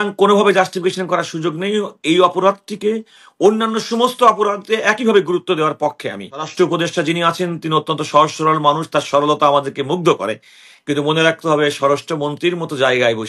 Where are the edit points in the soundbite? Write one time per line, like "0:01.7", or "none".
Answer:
0:06.5